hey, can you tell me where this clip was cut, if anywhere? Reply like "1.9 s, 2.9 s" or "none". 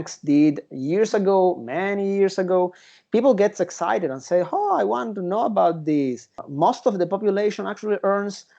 6.4 s